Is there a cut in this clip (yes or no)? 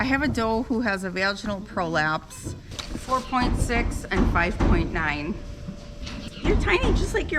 yes